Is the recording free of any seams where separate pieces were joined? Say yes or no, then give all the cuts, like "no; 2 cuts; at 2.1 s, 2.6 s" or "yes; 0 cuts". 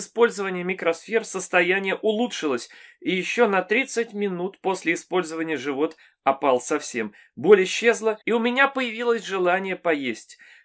yes; 0 cuts